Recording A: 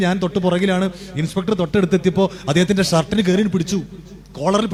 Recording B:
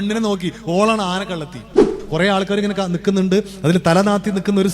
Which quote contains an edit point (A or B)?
B